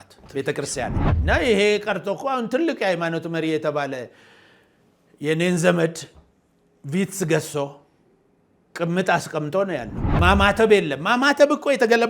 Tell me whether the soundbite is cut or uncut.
cut